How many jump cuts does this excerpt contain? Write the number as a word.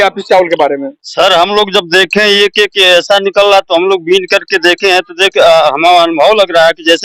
zero